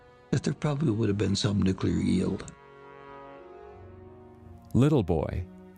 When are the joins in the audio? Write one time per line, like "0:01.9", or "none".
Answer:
0:03.5